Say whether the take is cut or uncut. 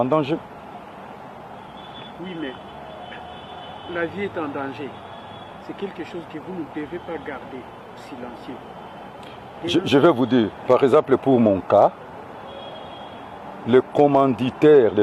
uncut